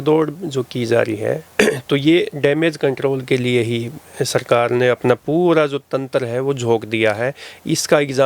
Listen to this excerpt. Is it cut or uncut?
uncut